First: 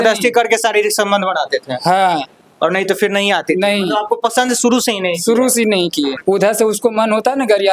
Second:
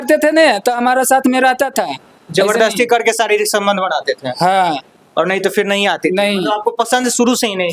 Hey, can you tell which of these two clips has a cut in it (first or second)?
first